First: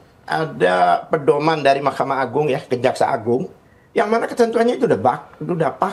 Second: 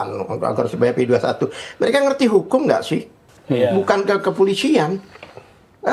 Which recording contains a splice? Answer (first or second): second